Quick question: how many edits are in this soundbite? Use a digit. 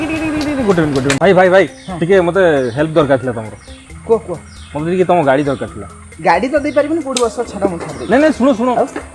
1